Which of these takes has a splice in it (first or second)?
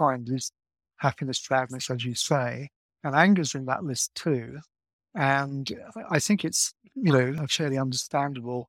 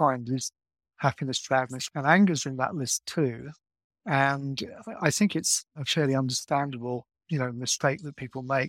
second